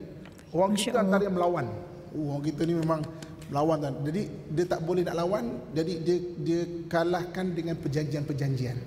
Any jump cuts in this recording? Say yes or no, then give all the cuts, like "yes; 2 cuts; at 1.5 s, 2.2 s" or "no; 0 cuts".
no; 0 cuts